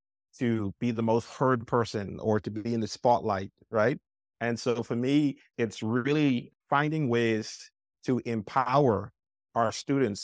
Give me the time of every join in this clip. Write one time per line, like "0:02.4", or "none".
0:05.5
0:06.5